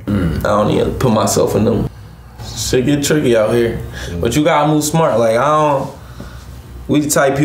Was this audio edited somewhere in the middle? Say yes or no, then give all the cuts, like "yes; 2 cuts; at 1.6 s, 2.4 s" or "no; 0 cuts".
yes; 1 cut; at 2.0 s